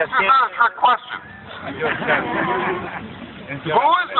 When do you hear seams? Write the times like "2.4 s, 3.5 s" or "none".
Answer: 1.5 s